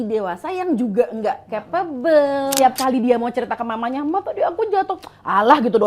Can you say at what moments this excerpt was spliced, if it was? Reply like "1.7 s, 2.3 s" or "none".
2.5 s